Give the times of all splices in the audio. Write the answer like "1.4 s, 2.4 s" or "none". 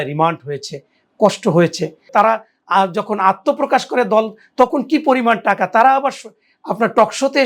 2.1 s